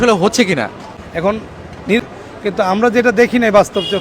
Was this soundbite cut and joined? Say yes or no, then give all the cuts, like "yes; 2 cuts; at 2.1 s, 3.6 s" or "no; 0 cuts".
yes; 1 cut; at 2.0 s